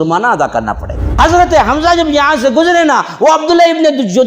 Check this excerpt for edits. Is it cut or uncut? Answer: cut